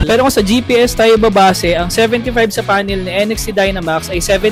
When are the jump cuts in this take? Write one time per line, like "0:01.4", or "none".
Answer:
none